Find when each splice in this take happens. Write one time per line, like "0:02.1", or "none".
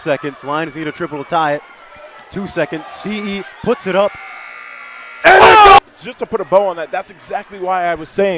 0:05.8